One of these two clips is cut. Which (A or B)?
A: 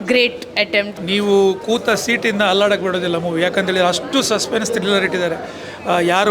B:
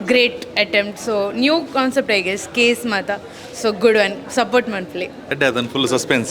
A